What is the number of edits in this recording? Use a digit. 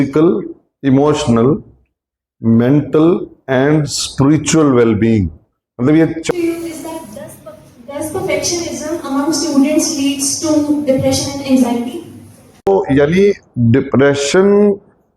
2